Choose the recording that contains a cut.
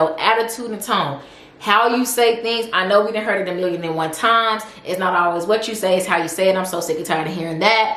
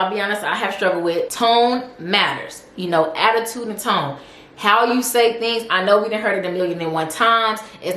second; 1 cut; at 1.3 s

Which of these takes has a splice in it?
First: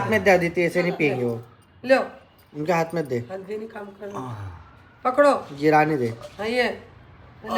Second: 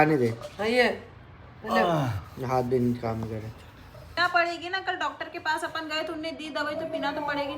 second; 1 cut; at 4.1 s

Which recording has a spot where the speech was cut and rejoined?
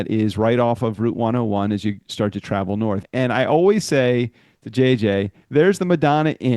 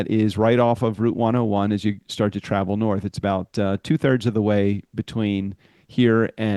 first; 2 cuts; at 3.0 s, 5.4 s

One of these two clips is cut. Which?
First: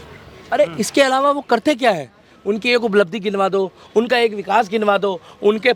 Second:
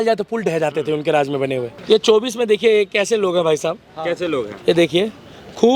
second; 1 cut; at 1.7 s

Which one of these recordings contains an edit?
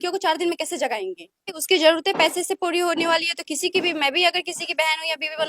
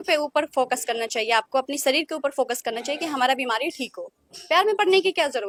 first; 1 cut; at 1.6 s

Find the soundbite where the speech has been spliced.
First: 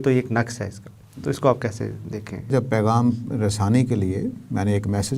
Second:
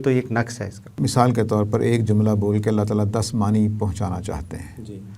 second; 1 cut; at 0.9 s

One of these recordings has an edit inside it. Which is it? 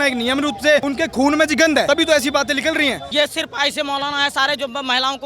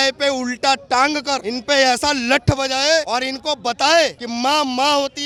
first; 3 cuts; at 0.8 s, 1.8 s, 3.0 s

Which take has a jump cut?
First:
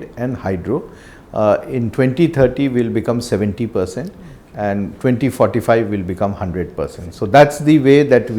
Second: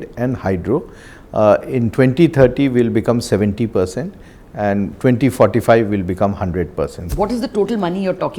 second; 1 cut; at 7.0 s

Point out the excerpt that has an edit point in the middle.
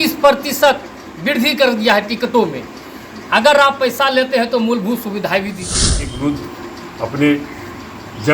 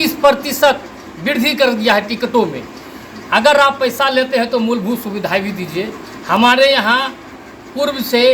first; 1 cut; at 6.1 s

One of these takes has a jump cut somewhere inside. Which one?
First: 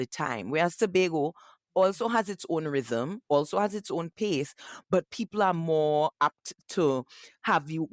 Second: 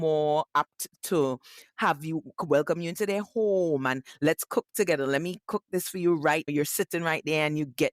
second; 1 cut; at 6.5 s

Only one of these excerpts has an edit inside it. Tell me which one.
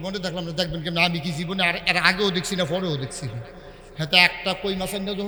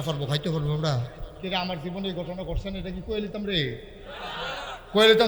second; 1 cut; at 1.2 s

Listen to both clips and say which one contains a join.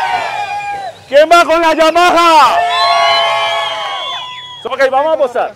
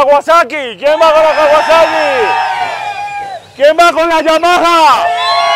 first; 1 cut; at 4.6 s

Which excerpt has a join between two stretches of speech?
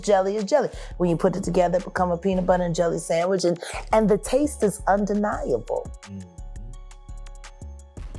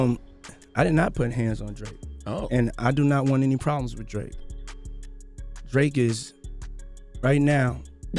first; 1 cut; at 6.3 s

